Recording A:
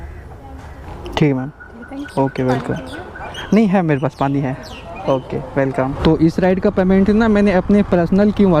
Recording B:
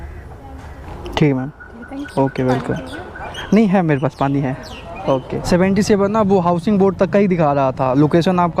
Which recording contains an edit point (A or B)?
B